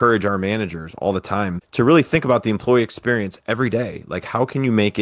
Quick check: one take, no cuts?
yes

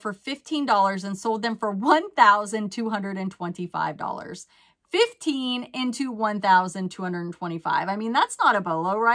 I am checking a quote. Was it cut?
no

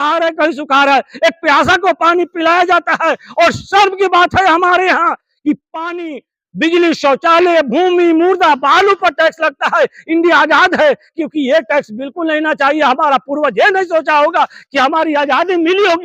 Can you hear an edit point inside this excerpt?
no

